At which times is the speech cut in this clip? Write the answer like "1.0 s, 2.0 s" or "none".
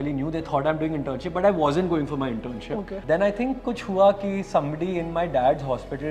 2.9 s